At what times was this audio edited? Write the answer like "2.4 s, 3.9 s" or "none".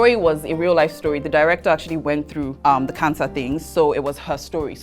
2.5 s